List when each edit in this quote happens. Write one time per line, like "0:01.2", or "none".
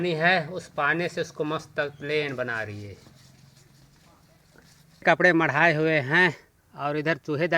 0:05.0